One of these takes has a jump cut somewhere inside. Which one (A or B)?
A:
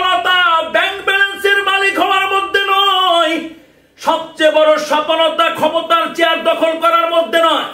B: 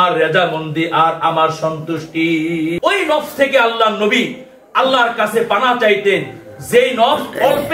B